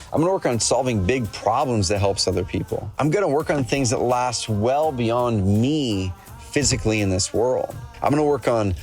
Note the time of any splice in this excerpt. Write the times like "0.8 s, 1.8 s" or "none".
2.9 s, 7.8 s